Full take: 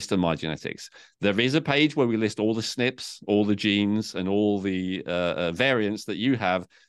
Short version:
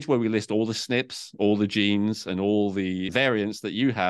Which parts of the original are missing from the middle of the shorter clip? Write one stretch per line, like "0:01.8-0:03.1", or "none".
0:05.0-0:05.5